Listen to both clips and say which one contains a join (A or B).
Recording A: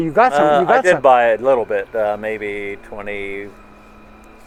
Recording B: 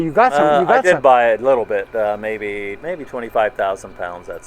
B